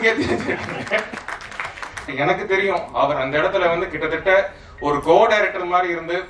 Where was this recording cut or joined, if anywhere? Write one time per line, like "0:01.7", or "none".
0:02.1